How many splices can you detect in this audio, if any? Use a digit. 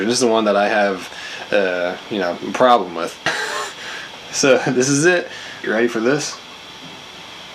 2